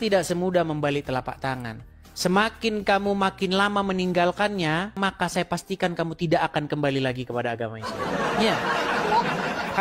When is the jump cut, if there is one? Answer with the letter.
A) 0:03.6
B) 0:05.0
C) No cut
B